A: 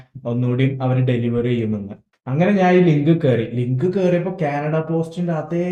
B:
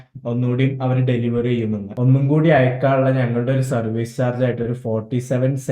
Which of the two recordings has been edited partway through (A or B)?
B